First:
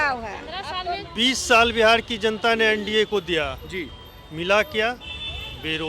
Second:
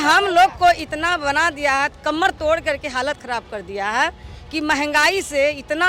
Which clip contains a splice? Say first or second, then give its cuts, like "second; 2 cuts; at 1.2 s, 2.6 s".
first; 1 cut; at 1.1 s